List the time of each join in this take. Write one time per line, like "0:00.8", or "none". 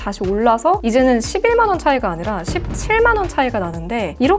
none